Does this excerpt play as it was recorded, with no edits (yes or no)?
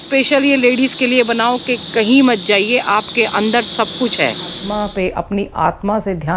no